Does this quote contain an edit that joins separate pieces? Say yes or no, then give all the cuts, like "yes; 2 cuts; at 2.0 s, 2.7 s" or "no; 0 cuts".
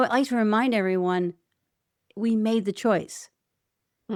no; 0 cuts